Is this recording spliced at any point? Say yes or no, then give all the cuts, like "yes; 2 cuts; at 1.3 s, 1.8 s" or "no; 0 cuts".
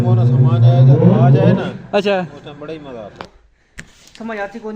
yes; 1 cut; at 3.2 s